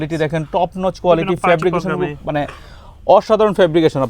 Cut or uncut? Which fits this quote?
uncut